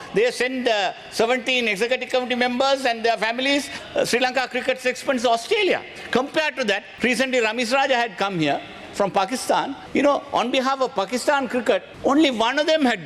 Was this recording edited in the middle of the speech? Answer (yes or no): yes